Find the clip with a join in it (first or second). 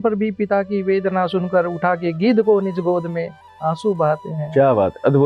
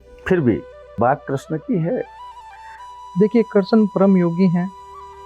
second